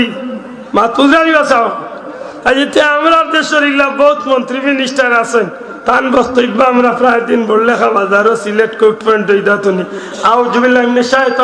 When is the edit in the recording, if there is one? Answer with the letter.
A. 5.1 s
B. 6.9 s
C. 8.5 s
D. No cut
D